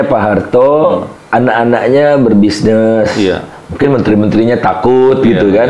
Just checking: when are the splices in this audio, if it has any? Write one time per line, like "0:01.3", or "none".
0:01.1

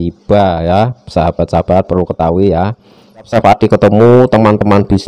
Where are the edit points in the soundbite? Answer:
0:03.3

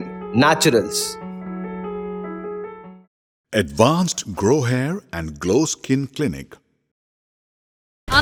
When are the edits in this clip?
none

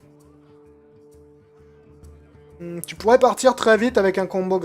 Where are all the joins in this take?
0:02.6

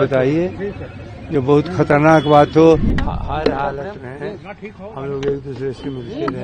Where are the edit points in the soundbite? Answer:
0:03.0

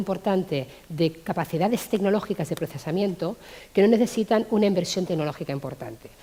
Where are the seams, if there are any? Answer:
none

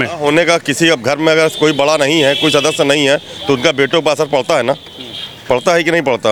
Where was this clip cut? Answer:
none

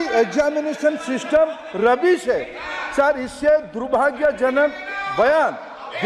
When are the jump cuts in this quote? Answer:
none

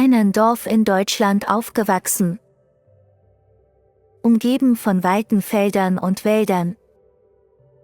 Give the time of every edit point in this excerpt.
none

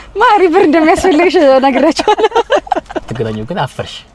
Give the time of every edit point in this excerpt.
0:03.0

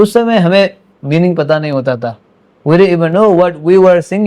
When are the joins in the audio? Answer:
none

